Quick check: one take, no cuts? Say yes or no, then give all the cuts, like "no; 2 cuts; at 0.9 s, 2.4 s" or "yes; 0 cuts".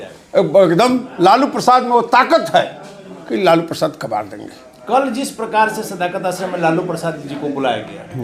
yes; 0 cuts